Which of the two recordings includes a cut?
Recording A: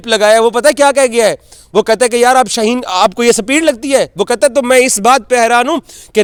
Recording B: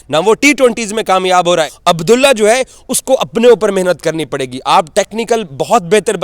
B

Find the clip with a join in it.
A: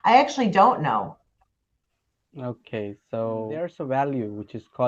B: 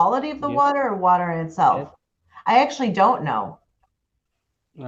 A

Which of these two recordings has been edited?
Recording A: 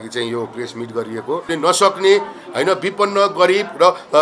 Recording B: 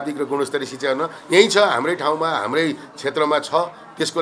A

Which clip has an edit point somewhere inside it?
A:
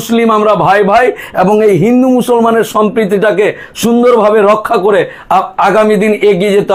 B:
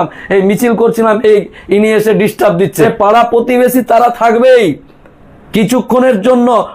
B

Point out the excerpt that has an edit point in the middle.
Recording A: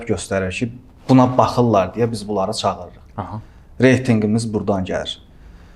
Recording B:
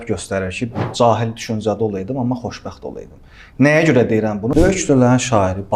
B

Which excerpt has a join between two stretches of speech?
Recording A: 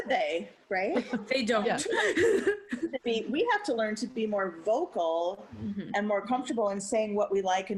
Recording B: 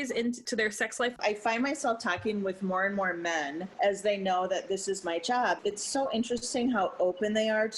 B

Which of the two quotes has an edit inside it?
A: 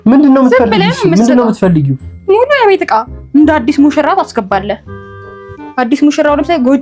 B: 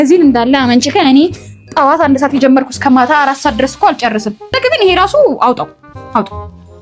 B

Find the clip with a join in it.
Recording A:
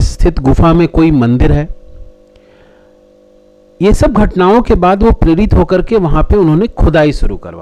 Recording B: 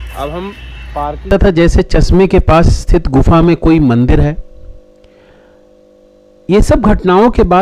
B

